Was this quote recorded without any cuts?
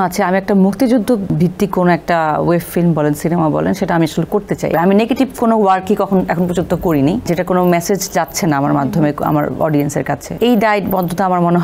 no; 4 cuts; at 1.3 s, 4.7 s, 7.2 s, 10.3 s

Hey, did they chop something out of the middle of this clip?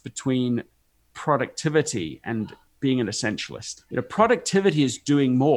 yes; 2 cuts; at 2.6 s, 3.8 s

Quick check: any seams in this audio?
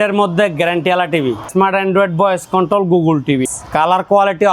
yes; 2 cuts; at 1.5 s, 3.6 s

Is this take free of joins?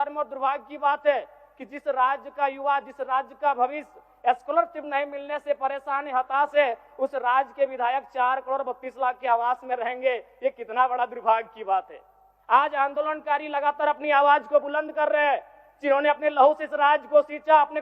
yes; 0 cuts

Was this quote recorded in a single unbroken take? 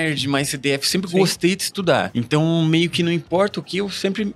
no; 1 cut; at 2.1 s

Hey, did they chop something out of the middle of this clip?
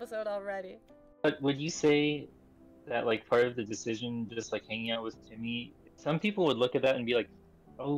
yes; 2 cuts; at 1.2 s, 5.8 s

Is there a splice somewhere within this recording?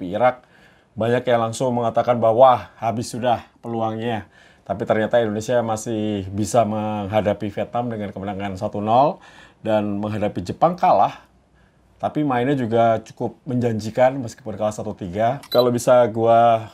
yes; 1 cut; at 15.4 s

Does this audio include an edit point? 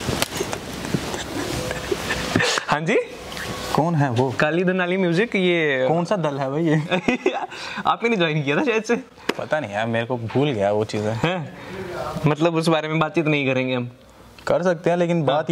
no; 0 cuts

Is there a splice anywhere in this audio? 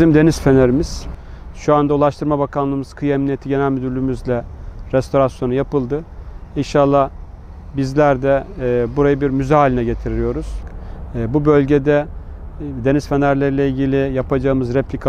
no; 0 cuts

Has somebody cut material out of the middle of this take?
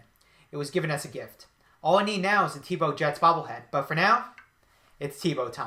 no; 0 cuts

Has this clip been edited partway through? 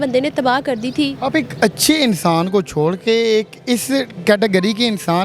no; 0 cuts

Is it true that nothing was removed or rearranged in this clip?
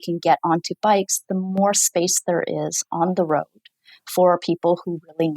yes; 0 cuts

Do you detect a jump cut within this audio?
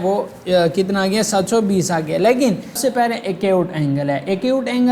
yes; 1 cut; at 2.8 s

